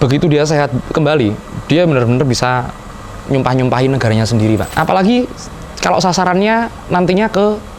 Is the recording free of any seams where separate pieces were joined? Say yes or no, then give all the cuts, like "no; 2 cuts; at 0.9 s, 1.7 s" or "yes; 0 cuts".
no; 1 cut; at 4.7 s